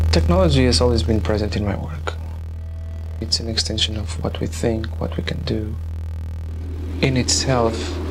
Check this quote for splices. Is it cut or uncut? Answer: cut